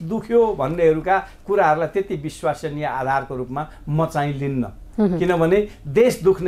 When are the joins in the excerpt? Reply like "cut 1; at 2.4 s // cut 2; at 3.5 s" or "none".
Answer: none